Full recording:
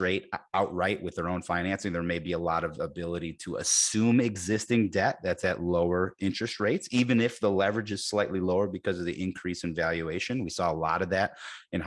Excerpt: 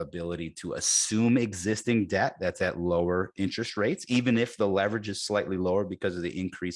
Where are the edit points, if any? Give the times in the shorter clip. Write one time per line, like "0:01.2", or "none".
none